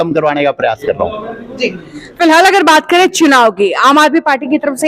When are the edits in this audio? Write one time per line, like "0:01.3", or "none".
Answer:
none